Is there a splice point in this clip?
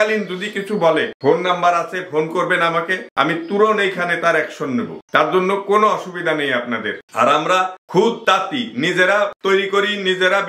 no; 0 cuts

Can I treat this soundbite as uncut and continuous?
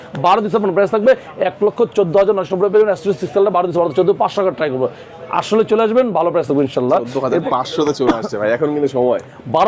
yes; 0 cuts

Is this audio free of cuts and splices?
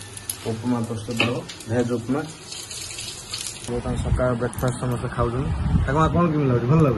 no; 1 cut; at 3.7 s

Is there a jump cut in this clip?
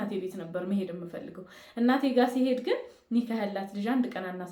no; 0 cuts

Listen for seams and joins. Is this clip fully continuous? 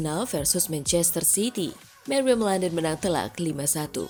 yes; 0 cuts

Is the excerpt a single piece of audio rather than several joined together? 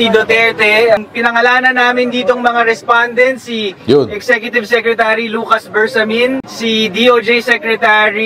no; 1 cut; at 0.9 s

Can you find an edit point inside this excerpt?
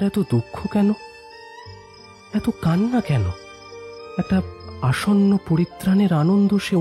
yes; 1 cut; at 4.0 s

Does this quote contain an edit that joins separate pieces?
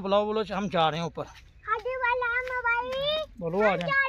no; 0 cuts

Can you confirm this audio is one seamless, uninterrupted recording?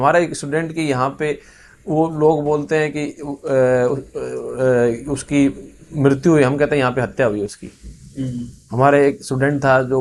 yes; 0 cuts

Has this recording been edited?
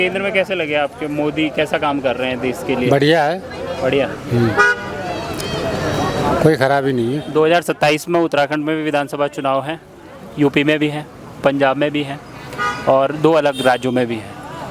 no; 0 cuts

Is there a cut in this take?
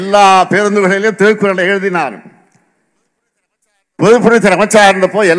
no; 0 cuts

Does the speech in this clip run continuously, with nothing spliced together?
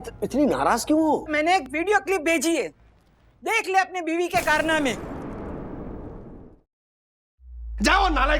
no; 1 cut; at 6.9 s

